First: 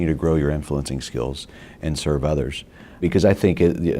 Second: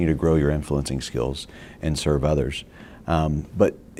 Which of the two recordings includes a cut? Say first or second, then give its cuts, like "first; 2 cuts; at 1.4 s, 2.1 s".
first; 1 cut; at 3.0 s